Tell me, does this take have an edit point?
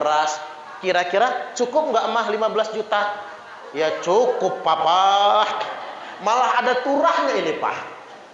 no; 0 cuts

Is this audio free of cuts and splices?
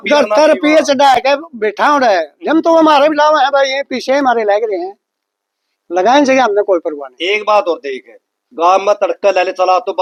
yes; 0 cuts

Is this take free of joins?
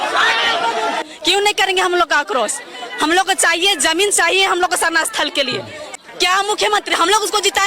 no; 2 cuts; at 1.0 s, 6.0 s

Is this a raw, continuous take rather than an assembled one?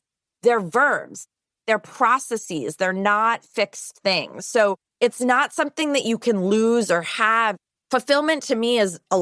no; 1 cut; at 4.9 s

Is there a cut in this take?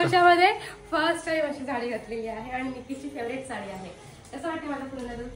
no; 0 cuts

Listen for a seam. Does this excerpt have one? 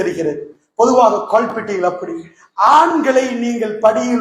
no; 0 cuts

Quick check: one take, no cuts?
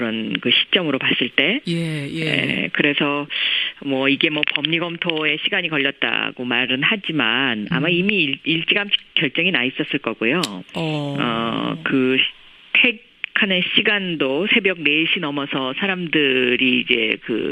no; 1 cut; at 5.2 s

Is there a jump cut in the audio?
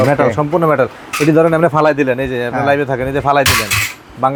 no; 0 cuts

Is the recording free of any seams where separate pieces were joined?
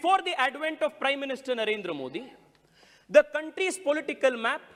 yes; 0 cuts

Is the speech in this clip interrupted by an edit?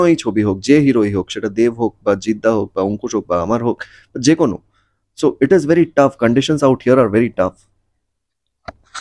no; 0 cuts

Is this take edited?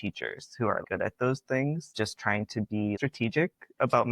yes; 3 cuts; at 0.8 s, 1.9 s, 3.0 s

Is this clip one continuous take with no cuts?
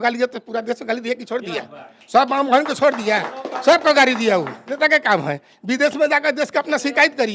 yes; 0 cuts

